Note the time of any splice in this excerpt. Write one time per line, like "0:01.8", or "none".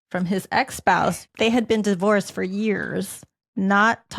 0:01.2